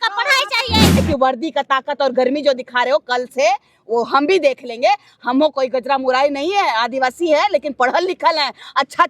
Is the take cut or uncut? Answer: cut